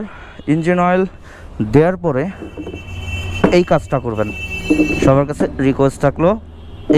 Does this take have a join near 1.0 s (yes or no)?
no